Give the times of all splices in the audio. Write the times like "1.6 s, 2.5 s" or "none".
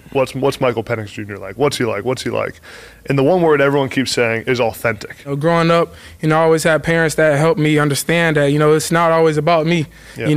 5.3 s

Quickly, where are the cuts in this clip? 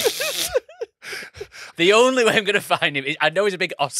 1.6 s

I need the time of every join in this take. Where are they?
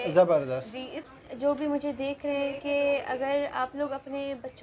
1.0 s

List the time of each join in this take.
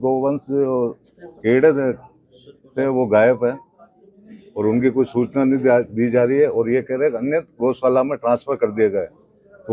none

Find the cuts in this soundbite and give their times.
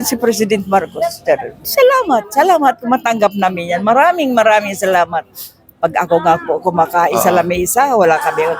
1.7 s

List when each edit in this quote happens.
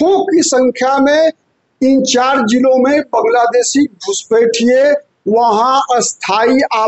none

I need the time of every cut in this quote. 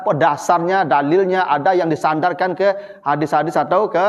none

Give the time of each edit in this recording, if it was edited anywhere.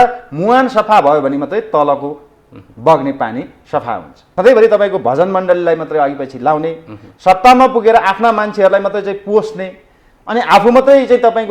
4.2 s

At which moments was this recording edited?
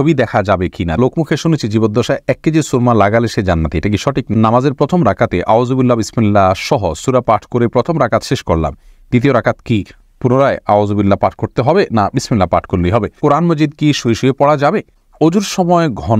1.0 s, 4.3 s, 13.1 s, 15.0 s

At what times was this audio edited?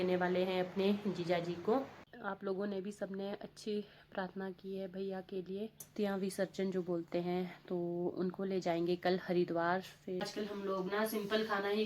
2.0 s, 5.9 s, 10.3 s

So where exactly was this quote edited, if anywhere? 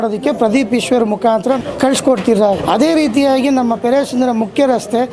1.6 s, 2.6 s

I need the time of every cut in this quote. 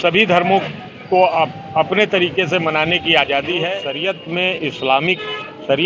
3.9 s

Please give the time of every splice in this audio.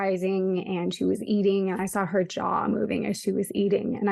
none

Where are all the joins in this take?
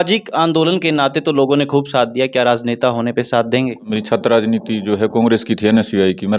3.9 s

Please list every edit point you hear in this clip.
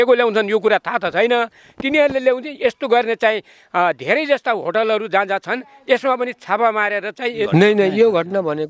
7.2 s

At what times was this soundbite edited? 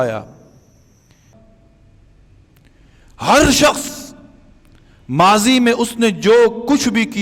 1.3 s

